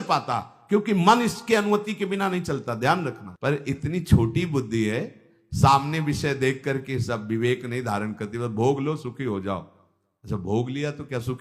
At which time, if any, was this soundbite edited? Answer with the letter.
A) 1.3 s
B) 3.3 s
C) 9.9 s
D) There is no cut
B